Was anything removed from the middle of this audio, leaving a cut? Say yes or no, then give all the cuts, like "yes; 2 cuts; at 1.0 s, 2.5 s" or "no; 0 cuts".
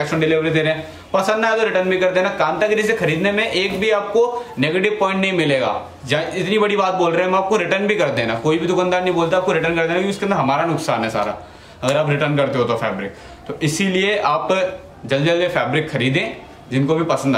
no; 0 cuts